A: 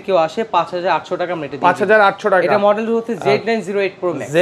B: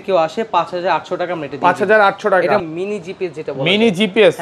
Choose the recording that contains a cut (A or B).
B